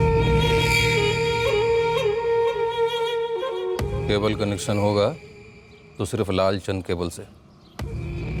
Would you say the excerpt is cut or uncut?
uncut